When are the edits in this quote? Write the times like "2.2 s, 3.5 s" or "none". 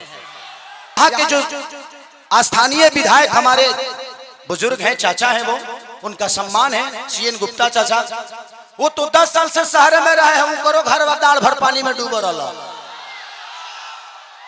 1.0 s